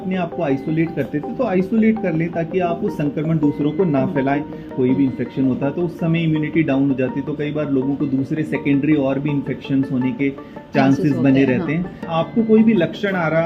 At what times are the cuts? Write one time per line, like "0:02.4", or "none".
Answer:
0:04.6
0:12.1